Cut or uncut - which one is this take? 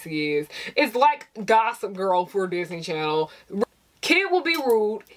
cut